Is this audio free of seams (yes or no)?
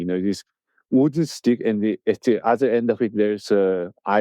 yes